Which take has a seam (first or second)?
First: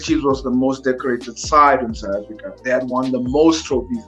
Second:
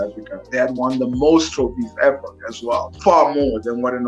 second